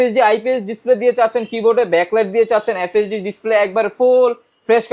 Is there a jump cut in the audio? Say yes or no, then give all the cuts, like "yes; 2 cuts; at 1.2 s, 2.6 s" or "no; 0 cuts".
no; 0 cuts